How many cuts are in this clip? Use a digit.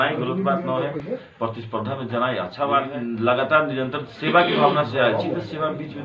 2